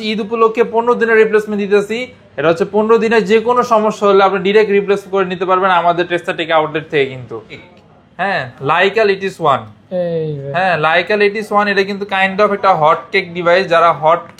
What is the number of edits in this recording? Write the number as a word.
one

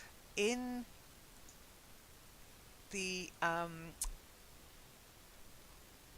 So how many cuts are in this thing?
one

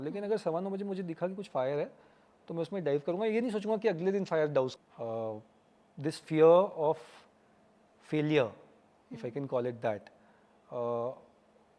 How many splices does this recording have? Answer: one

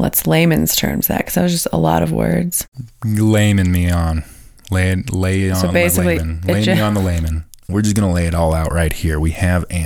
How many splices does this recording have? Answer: one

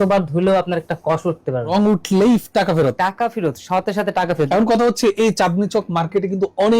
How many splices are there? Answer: two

